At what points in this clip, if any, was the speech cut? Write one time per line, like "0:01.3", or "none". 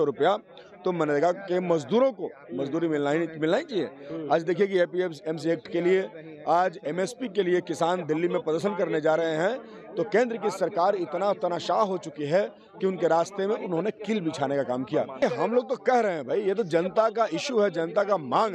0:15.2